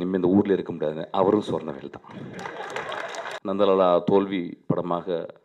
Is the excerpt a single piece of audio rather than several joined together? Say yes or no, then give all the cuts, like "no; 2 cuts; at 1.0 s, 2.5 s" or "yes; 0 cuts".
no; 1 cut; at 3.4 s